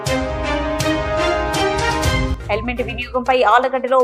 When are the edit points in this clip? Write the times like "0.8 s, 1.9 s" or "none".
2.3 s